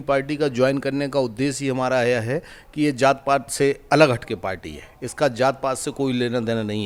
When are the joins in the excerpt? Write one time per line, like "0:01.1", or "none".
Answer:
none